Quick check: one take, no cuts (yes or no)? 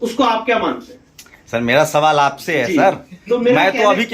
yes